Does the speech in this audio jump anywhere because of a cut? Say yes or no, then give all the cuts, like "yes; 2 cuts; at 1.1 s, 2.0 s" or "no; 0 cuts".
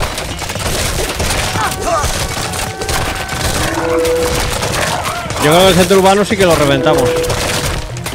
no; 0 cuts